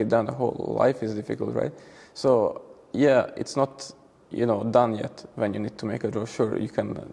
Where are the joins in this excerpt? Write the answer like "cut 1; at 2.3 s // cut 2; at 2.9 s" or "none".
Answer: none